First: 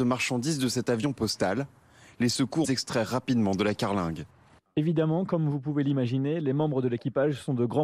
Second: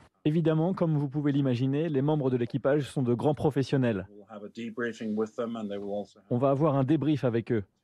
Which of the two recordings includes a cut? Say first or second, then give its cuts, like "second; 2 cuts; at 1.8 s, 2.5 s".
first; 1 cut; at 2.6 s